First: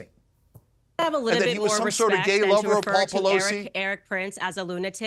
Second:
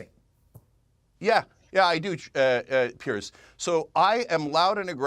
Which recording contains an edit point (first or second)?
first